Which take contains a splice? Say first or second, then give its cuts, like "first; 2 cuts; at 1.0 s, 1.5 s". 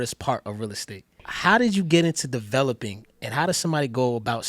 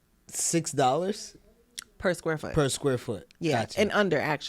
first; 1 cut; at 1.3 s